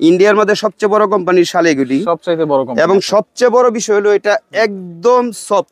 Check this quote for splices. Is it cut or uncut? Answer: uncut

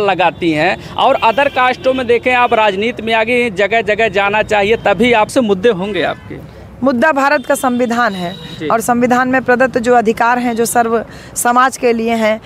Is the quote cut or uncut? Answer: cut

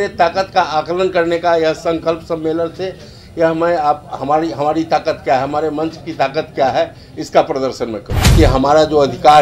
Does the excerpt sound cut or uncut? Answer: cut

